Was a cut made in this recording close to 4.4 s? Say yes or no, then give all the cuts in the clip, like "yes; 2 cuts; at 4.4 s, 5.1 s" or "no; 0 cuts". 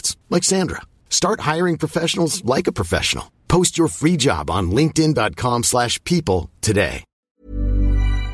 no; 1 cut; at 7.1 s